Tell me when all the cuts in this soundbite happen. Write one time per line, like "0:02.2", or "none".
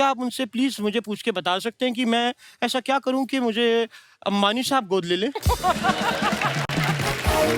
none